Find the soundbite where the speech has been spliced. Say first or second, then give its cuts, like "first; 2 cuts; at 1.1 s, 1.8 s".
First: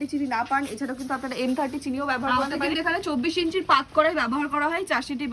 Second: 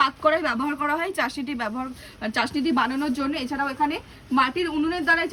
first; 1 cut; at 2.3 s